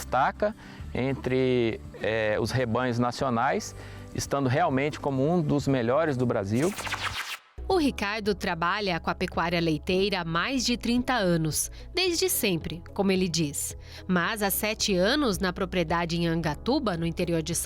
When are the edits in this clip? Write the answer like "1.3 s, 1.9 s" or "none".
7.2 s